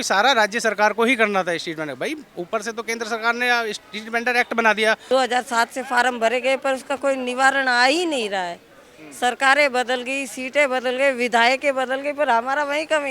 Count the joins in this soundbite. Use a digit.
1